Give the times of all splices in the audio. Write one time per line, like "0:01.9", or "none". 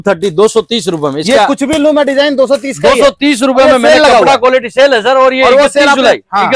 none